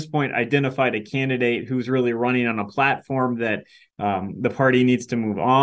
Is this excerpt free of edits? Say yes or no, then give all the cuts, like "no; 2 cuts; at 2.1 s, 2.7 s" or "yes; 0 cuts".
yes; 0 cuts